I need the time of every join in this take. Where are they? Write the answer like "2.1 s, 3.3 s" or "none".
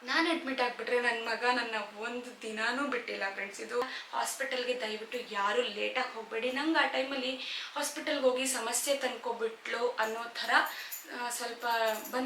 3.8 s